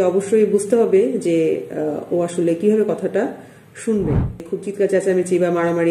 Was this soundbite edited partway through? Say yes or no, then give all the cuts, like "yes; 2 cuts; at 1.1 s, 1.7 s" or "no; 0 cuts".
yes; 1 cut; at 4.5 s